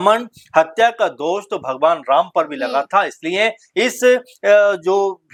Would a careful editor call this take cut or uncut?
uncut